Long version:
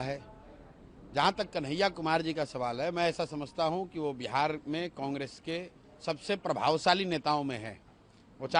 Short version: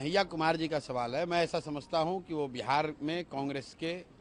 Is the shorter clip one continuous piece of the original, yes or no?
yes